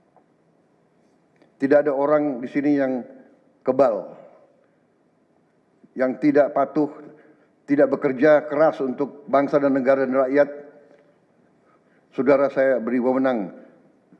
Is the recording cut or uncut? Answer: uncut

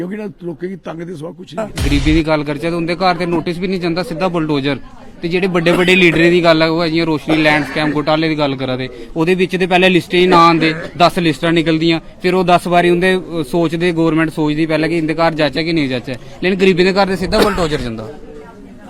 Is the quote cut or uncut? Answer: cut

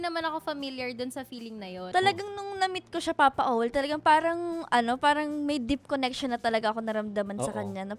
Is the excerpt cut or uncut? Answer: cut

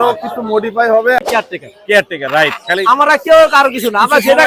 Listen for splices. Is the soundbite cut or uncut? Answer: cut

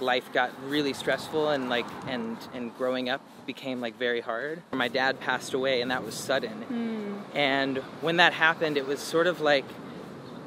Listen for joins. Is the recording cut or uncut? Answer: cut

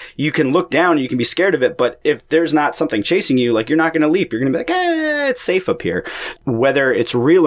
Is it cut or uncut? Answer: cut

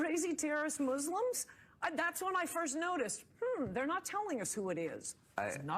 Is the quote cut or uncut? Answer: uncut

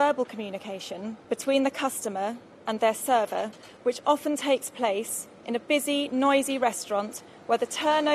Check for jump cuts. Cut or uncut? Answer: cut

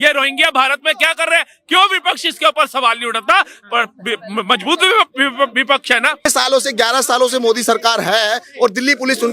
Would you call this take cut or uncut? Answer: cut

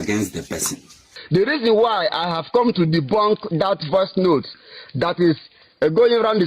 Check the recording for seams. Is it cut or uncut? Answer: cut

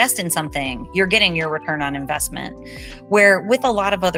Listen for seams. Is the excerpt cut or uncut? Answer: uncut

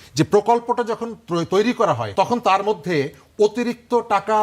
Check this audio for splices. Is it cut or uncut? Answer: cut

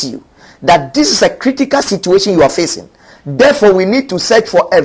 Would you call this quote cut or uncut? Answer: uncut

